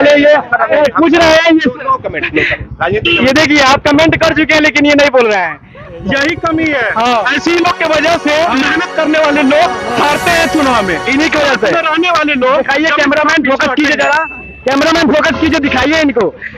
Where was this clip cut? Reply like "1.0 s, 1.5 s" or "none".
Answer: none

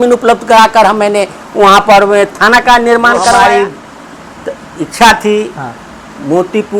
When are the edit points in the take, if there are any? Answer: 3.3 s

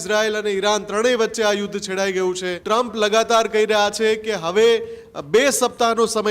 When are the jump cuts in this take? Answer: 2.5 s

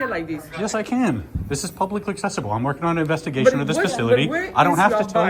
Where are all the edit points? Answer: none

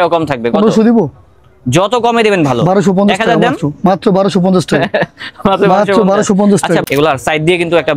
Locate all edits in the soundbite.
6.8 s

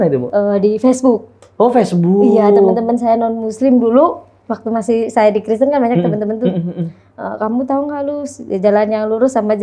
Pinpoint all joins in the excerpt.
none

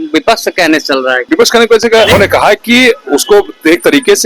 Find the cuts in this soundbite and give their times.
1.3 s, 2.1 s

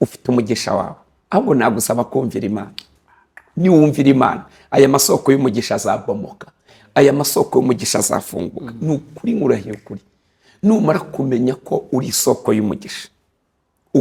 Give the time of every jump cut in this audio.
none

